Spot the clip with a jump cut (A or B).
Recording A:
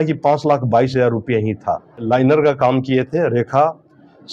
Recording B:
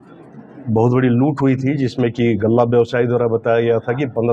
A